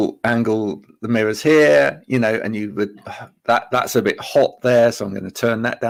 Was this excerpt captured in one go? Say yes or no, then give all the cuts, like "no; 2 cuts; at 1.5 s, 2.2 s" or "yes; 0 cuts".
yes; 0 cuts